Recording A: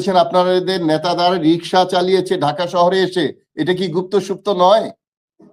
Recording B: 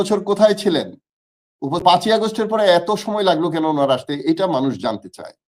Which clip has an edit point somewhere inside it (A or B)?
B